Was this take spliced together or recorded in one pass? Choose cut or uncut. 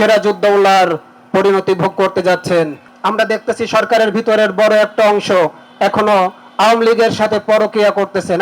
cut